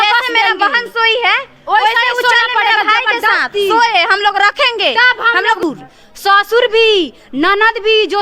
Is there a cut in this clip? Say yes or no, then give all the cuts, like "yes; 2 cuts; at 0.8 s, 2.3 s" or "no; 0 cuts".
yes; 1 cut; at 5.6 s